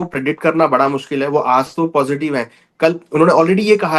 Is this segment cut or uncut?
uncut